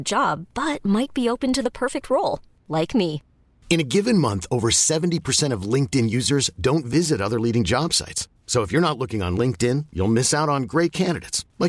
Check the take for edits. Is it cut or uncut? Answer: uncut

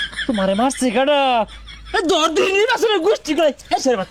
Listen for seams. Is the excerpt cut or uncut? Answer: uncut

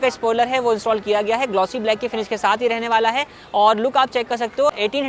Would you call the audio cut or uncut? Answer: uncut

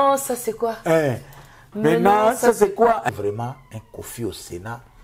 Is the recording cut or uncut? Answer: cut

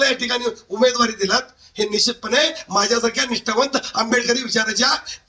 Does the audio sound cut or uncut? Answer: uncut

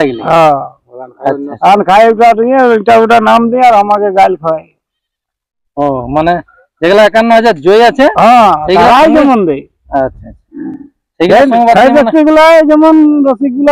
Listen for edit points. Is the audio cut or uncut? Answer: uncut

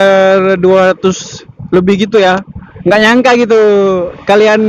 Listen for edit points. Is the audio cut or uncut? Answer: uncut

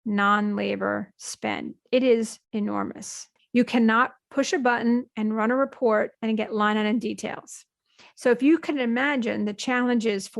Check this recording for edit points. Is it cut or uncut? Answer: cut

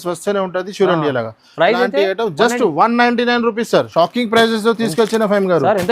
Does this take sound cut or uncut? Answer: cut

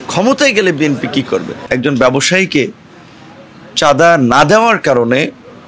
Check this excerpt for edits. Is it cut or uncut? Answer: cut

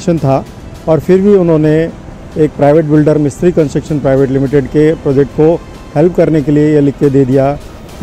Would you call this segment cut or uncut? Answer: uncut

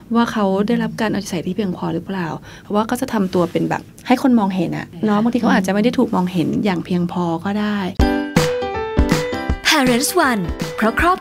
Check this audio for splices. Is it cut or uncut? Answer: cut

